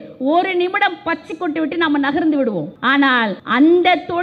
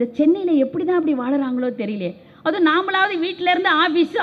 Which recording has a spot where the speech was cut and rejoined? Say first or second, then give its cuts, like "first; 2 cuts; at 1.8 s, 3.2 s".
first; 1 cut; at 3.0 s